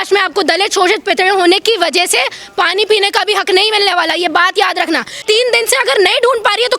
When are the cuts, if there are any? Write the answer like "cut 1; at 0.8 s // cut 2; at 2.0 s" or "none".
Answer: cut 1; at 5.2 s